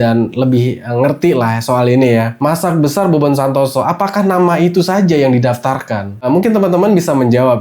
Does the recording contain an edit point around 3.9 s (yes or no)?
no